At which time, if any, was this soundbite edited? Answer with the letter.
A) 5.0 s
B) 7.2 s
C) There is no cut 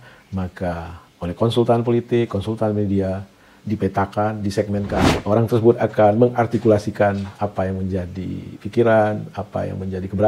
A